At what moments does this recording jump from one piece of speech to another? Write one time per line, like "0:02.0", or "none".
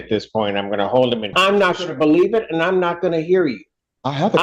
0:01.3